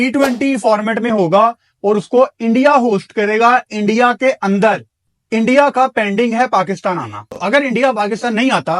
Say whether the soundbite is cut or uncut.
cut